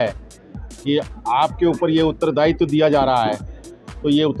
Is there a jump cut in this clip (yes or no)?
no